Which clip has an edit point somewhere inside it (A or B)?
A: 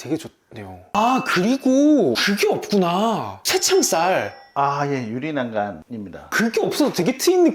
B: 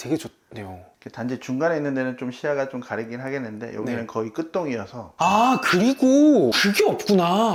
A